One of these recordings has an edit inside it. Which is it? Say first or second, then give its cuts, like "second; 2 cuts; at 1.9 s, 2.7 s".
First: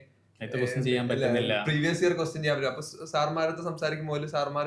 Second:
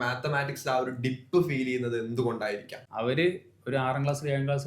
second; 1 cut; at 2.8 s